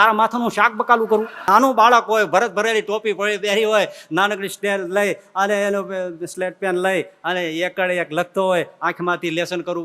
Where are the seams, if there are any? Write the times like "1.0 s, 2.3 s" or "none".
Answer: 1.4 s